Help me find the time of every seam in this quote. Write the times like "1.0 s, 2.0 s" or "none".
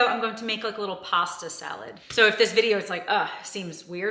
1.9 s